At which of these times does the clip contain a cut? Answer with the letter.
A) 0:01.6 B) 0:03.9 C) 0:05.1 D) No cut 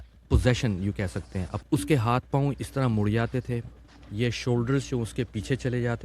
A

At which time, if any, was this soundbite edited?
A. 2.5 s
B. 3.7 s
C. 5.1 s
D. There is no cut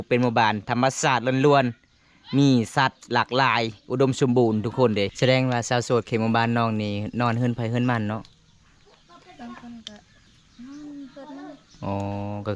C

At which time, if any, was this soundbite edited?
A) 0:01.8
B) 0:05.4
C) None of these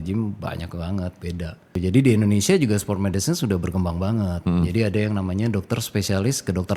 A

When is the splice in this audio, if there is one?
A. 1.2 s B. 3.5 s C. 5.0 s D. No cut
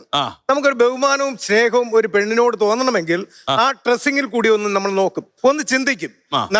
D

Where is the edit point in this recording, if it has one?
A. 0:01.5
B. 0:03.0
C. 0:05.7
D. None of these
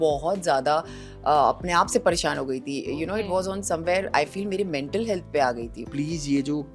C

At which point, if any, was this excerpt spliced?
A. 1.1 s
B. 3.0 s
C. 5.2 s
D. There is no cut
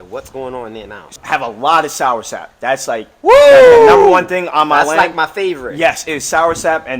A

